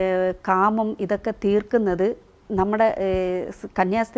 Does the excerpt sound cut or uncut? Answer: uncut